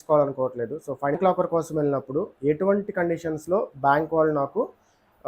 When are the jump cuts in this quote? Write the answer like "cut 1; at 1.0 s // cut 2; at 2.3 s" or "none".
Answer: cut 1; at 1.2 s